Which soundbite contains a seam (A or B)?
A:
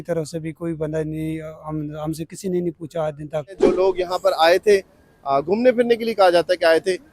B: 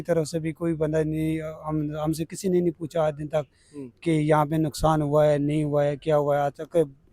A